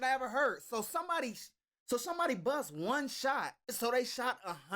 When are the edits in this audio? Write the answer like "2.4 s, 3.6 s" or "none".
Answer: 3.7 s